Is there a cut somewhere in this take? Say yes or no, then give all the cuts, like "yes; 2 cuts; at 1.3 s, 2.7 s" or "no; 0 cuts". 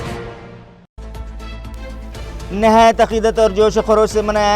yes; 2 cuts; at 1.0 s, 2.5 s